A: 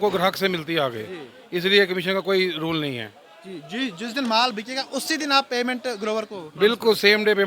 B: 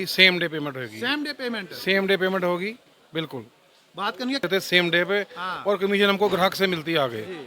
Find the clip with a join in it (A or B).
B